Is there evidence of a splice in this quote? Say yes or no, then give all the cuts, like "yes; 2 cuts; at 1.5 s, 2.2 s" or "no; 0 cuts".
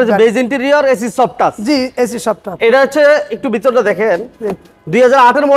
no; 0 cuts